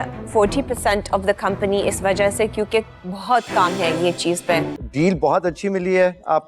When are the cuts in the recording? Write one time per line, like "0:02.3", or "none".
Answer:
0:04.8